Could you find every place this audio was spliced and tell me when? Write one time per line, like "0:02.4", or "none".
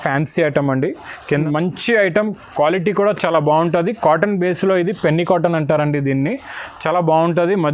0:01.4